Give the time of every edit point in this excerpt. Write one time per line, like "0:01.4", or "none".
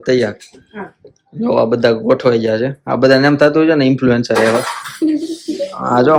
none